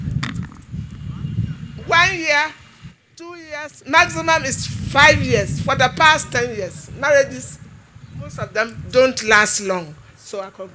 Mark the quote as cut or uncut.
uncut